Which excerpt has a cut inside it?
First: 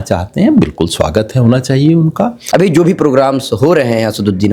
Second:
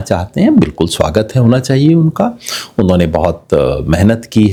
first; 1 cut; at 2.4 s

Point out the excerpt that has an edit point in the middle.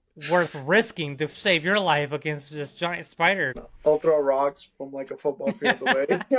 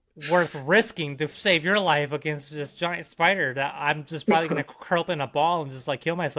first; 1 cut; at 3.5 s

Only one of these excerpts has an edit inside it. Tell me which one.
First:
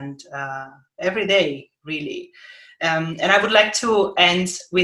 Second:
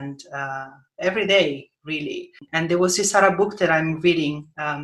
second; 1 cut; at 2.4 s

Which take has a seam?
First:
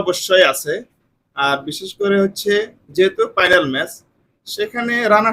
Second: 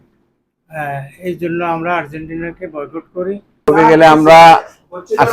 second; 1 cut; at 3.5 s

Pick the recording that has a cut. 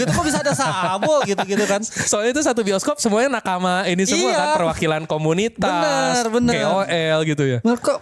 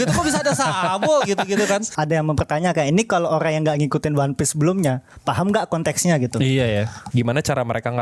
second; 2 cuts; at 1.9 s, 7.0 s

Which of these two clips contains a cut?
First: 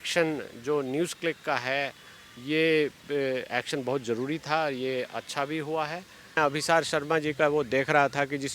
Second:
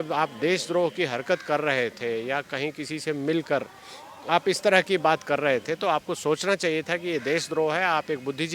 first; 1 cut; at 6.4 s

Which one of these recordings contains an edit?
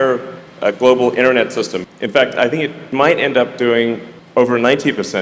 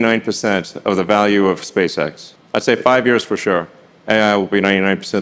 first; 2 cuts; at 1.8 s, 2.9 s

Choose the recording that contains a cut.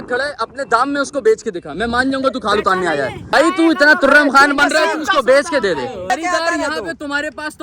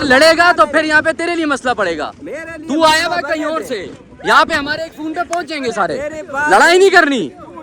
first; 2 cuts; at 3.3 s, 6.1 s

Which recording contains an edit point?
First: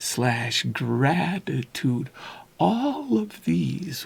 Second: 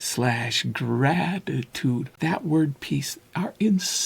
second; 2 cuts; at 2.1 s, 3.2 s

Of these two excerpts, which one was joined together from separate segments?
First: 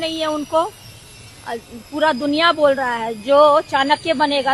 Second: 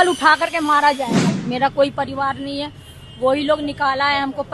second; 1 cut; at 1.4 s

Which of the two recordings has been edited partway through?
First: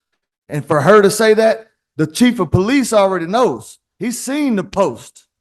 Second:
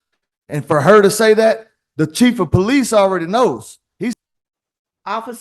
second; 1 cut; at 4.2 s

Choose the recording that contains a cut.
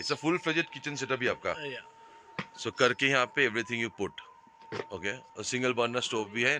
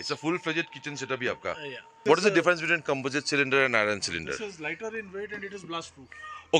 second; 1 cut; at 2.0 s

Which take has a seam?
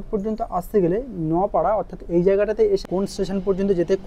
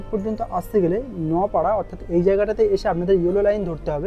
first; 1 cut; at 2.8 s

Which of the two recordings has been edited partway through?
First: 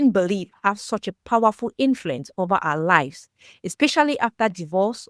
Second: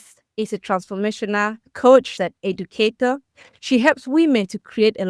second; 1 cut; at 2.1 s

